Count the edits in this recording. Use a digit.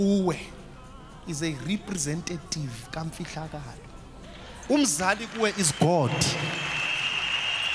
0